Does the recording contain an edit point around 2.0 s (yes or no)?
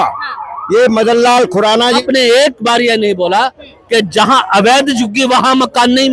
yes